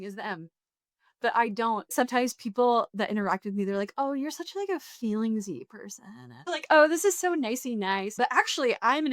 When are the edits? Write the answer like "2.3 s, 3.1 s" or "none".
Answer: 1.9 s, 6.4 s, 8.1 s